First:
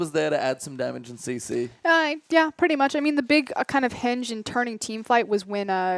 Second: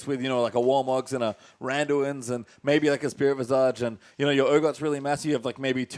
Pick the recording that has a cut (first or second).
first